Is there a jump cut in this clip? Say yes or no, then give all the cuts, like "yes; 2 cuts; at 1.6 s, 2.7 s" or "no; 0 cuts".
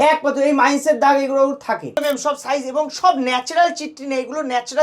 yes; 1 cut; at 2.0 s